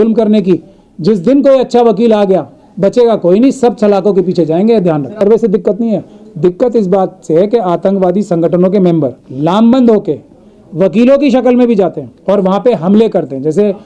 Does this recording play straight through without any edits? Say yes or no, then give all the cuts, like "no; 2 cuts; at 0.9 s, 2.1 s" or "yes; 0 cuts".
no; 3 cuts; at 5.2 s, 9.2 s, 12.1 s